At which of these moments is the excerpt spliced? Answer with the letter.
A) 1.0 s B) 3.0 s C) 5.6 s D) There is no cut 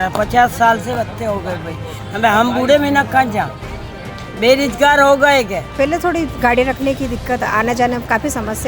C